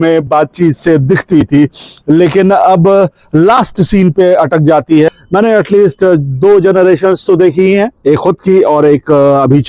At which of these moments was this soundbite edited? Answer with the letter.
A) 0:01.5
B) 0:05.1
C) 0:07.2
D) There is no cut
B